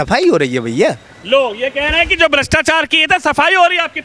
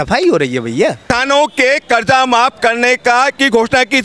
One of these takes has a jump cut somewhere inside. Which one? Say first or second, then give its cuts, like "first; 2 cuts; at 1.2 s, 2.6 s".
second; 1 cut; at 1.0 s